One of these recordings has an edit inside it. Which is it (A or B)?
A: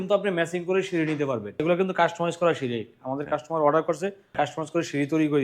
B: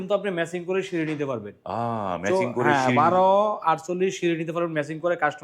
A